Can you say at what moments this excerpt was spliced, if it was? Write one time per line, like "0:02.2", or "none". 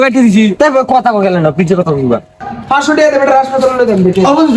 0:02.4